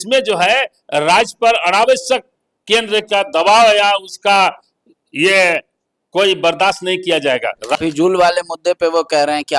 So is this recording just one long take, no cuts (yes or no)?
no